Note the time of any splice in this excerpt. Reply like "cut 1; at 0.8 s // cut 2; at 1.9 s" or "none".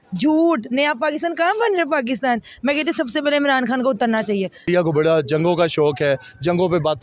cut 1; at 4.6 s